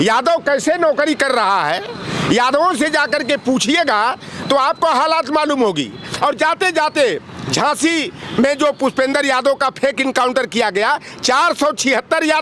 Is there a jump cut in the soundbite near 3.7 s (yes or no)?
no